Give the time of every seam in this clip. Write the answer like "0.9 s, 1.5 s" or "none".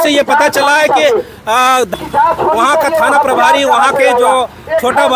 2.0 s